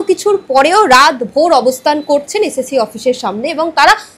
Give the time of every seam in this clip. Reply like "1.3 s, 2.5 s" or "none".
none

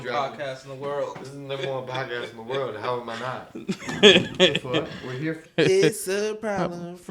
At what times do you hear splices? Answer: 5.5 s

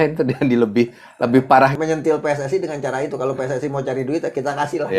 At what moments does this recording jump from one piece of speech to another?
1.7 s

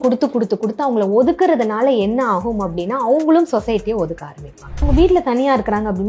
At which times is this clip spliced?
4.8 s

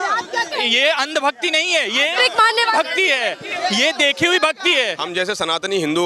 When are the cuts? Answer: 5.0 s

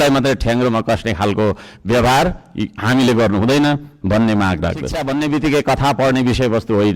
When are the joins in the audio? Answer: 5.0 s

